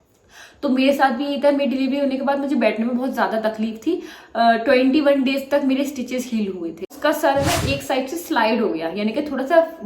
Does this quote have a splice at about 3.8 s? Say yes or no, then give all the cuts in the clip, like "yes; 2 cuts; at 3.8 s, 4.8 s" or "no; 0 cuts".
no; 1 cut; at 6.9 s